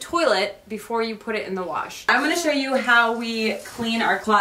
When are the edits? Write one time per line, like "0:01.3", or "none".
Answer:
0:02.0